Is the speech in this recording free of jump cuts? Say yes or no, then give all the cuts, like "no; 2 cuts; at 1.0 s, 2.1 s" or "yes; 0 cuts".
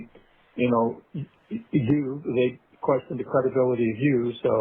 no; 1 cut; at 3.1 s